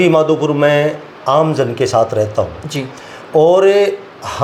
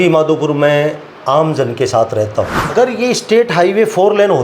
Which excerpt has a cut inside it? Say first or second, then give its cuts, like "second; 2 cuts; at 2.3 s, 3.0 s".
second; 1 cut; at 2.7 s